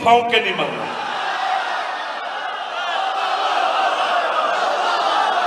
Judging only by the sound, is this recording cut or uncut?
uncut